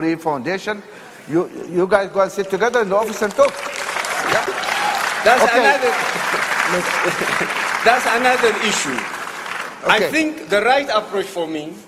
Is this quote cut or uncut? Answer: uncut